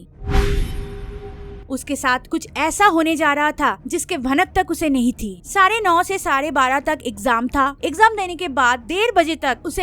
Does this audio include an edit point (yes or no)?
yes